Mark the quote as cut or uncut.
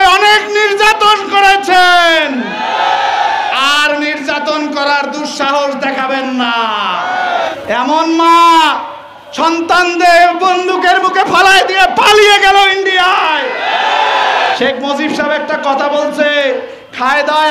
cut